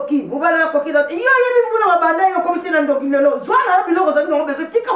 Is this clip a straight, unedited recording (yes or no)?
yes